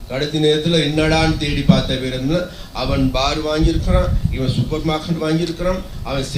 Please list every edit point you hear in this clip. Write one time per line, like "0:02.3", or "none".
none